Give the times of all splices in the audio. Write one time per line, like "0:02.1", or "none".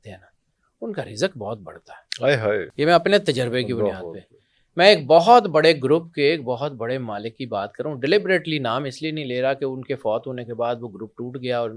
none